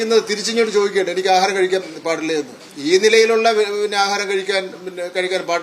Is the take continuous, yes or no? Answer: no